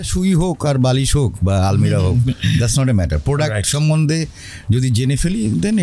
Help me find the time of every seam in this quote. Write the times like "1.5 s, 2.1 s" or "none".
none